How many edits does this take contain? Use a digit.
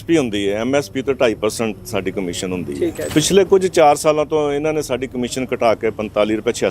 1